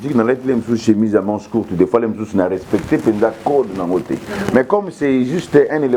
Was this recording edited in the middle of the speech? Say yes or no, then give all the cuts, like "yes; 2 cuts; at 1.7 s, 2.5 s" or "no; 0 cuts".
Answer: no; 0 cuts